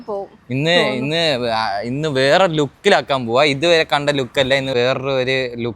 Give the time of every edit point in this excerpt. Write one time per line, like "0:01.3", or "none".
0:04.7